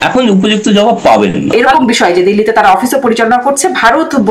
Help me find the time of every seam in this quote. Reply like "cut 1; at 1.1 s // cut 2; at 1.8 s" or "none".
cut 1; at 1.6 s